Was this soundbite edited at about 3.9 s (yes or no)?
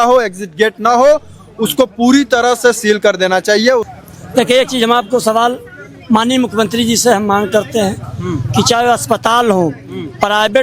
yes